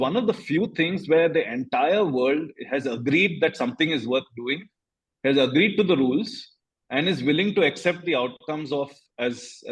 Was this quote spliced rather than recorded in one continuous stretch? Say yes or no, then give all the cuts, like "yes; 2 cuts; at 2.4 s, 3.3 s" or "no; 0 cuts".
no; 0 cuts